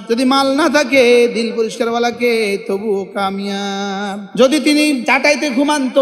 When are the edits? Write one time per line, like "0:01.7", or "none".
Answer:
0:04.3
0:05.0